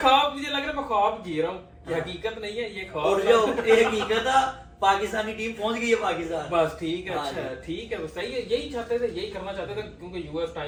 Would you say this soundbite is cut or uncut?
uncut